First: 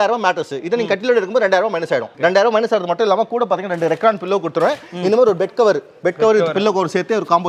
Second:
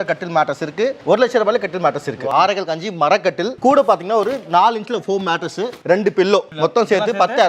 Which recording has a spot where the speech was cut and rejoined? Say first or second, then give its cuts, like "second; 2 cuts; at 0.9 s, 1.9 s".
second; 4 cuts; at 1.0 s, 2.2 s, 5.7 s, 6.5 s